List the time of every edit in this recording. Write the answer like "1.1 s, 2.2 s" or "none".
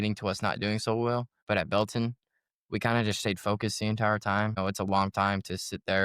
1.3 s, 4.6 s